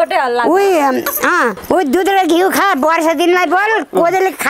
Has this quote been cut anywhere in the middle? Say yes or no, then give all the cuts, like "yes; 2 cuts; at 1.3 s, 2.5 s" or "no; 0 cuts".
no; 0 cuts